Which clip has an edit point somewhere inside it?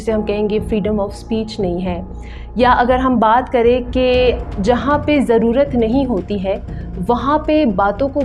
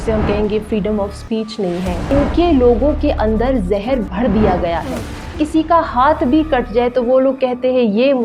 second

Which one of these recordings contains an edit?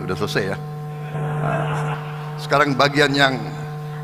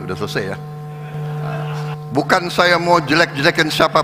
second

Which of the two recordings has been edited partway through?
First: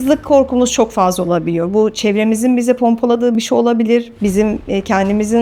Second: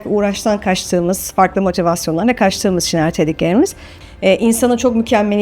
second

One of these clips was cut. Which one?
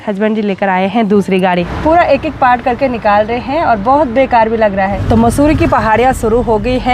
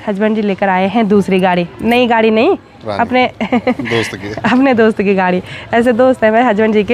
first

